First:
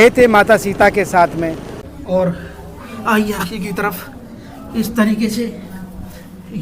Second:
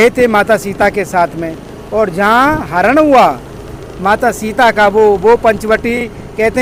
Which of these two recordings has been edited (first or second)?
first